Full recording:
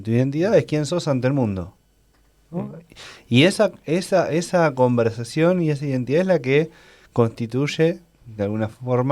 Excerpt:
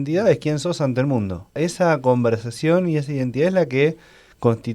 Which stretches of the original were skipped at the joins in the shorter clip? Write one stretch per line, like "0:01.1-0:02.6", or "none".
0:01.8-0:04.3